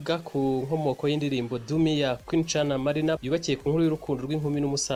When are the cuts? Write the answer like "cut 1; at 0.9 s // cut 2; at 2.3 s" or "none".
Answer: none